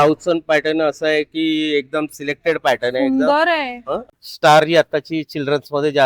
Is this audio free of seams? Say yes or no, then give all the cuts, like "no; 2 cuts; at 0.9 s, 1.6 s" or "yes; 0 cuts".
no; 1 cut; at 4.1 s